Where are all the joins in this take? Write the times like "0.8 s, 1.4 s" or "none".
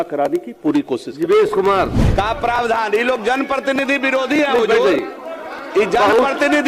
2.0 s